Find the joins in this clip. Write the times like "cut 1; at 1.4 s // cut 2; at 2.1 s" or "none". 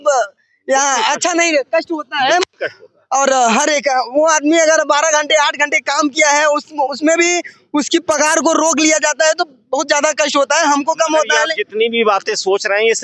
none